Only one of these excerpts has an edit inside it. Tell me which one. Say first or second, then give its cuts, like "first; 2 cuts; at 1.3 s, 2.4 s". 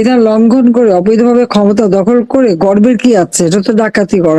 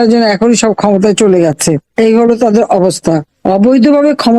second; 2 cuts; at 1.9 s, 3.3 s